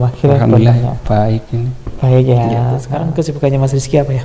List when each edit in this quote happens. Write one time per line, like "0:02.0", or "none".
0:03.0